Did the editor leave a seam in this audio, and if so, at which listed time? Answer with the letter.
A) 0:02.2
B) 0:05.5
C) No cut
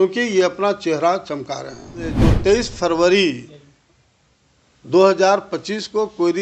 A